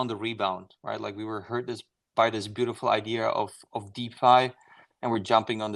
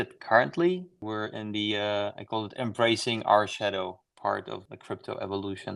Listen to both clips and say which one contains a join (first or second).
second